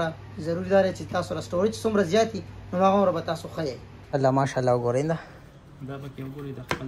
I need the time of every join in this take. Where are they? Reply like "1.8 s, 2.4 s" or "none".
4.1 s